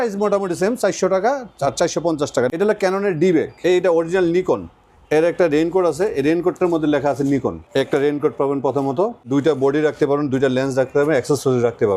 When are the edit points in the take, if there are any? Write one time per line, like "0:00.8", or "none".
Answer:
0:02.5
0:03.5
0:07.6
0:09.3